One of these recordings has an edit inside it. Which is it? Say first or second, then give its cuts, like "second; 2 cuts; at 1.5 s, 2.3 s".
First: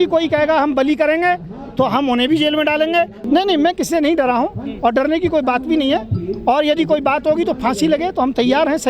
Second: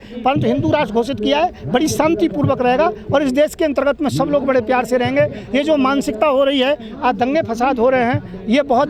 first; 1 cut; at 3.2 s